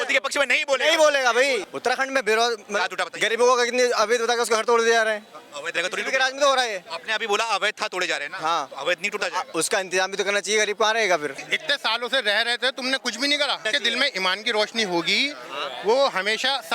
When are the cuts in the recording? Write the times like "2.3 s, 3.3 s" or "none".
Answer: 1.6 s, 11.5 s, 13.6 s